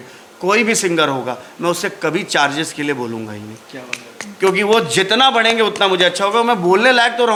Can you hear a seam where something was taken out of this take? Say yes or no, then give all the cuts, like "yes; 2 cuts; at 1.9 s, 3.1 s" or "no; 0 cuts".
no; 0 cuts